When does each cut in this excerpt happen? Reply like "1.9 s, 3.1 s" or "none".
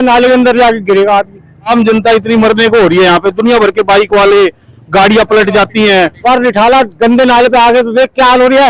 1.7 s, 6.2 s